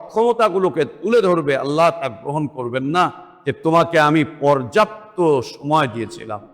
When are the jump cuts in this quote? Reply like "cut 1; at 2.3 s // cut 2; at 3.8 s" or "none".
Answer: cut 1; at 3.3 s